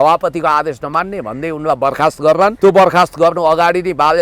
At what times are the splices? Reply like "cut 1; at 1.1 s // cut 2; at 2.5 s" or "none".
cut 1; at 2.5 s

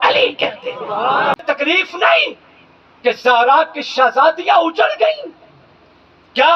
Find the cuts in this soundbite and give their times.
cut 1; at 1.4 s

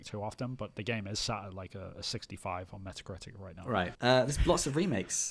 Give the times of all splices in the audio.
cut 1; at 3.9 s

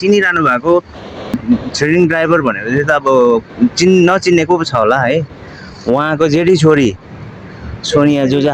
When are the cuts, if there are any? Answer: cut 1; at 1.4 s

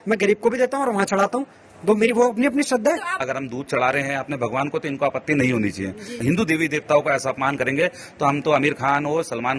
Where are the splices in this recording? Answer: cut 1; at 3.2 s // cut 2; at 6.1 s

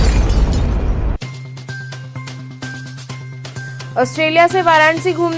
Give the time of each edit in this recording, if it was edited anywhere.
cut 1; at 2.5 s // cut 2; at 3.5 s

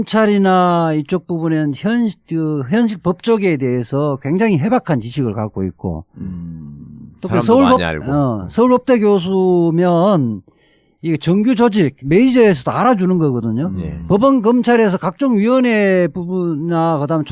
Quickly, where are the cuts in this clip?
cut 1; at 11.3 s

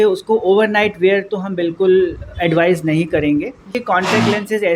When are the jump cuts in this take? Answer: cut 1; at 3.7 s

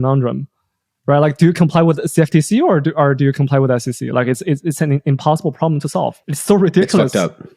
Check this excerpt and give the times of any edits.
cut 1; at 6.3 s

